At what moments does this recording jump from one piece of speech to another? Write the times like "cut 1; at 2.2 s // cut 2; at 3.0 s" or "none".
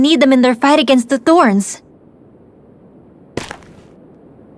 none